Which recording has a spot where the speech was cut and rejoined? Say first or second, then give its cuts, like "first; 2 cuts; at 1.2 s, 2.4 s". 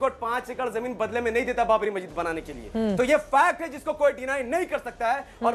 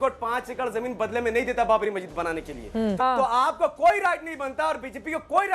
second; 1 cut; at 2.9 s